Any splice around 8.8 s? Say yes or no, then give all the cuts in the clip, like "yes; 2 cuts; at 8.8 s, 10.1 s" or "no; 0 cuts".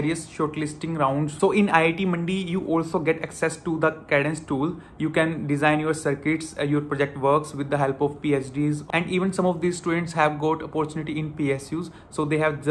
yes; 2 cuts; at 1.3 s, 8.8 s